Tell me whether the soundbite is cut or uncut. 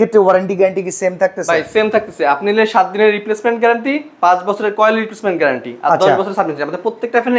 uncut